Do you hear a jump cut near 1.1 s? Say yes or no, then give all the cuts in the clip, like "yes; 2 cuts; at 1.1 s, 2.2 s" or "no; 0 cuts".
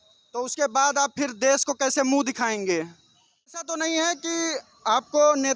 no; 1 cut; at 3.6 s